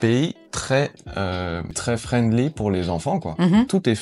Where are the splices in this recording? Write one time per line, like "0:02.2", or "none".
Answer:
0:01.8